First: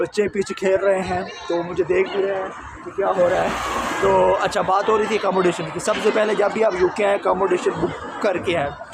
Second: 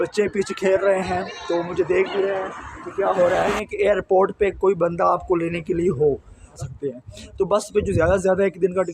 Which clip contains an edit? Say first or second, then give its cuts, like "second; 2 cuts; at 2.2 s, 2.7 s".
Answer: second; 2 cuts; at 3.6 s, 6.6 s